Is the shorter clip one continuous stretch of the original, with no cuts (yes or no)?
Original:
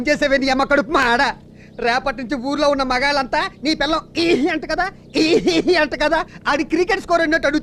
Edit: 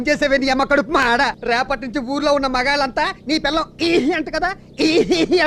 no